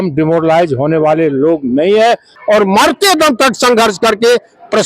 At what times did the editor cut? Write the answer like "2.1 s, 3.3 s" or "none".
2.4 s